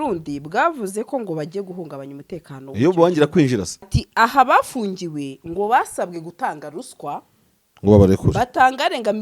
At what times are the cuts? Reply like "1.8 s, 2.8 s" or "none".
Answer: 4.0 s